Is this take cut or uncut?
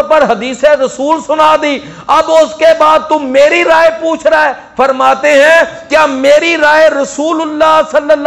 uncut